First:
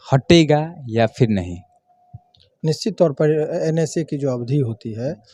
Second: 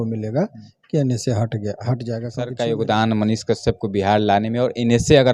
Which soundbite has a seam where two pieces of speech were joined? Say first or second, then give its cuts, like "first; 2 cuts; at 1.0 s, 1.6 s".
second; 1 cut; at 2.4 s